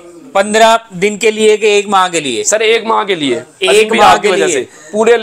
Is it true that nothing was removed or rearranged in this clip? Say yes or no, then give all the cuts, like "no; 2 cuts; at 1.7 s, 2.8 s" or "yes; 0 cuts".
yes; 0 cuts